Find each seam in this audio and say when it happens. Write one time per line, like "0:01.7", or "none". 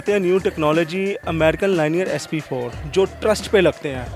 none